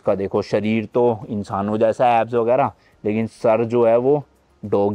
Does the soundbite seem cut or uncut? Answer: uncut